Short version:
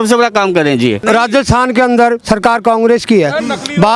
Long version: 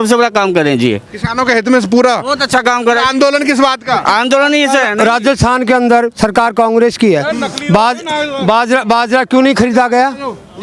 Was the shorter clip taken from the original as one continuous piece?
no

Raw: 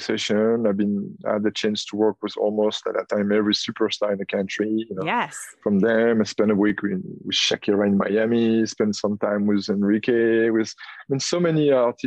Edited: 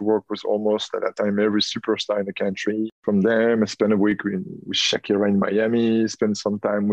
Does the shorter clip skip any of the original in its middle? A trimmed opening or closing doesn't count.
yes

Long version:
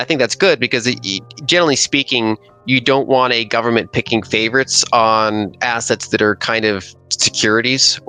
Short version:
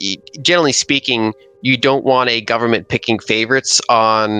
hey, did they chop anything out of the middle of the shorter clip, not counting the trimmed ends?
no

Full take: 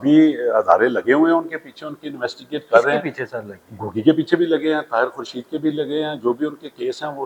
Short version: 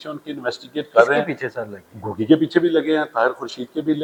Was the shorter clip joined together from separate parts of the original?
no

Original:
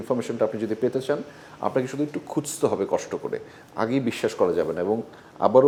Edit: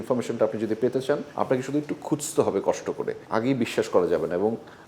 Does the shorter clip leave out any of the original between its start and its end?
yes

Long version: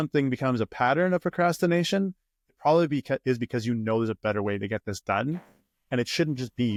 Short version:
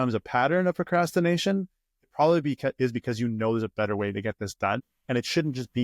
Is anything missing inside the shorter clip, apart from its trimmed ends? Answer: yes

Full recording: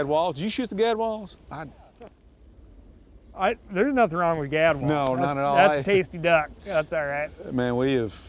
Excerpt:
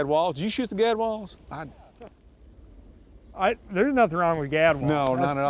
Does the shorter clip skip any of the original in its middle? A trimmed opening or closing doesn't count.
no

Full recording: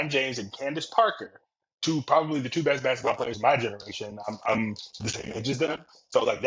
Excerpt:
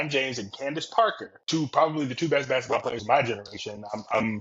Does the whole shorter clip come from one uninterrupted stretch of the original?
no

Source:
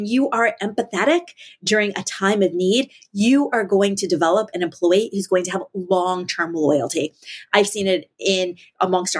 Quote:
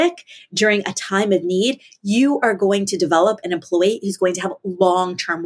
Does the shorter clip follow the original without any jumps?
yes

